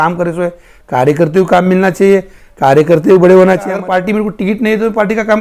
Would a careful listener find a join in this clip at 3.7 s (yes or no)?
yes